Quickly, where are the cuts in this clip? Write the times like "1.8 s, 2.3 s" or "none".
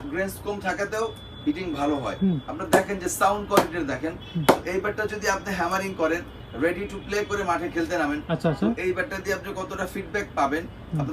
none